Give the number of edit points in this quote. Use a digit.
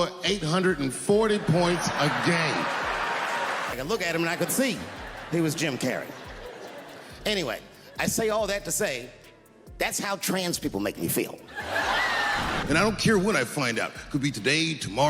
2